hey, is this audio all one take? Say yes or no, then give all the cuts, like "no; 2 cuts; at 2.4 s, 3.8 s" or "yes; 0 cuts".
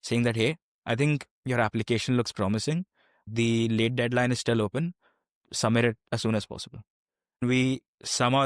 no; 2 cuts; at 3.2 s, 7.4 s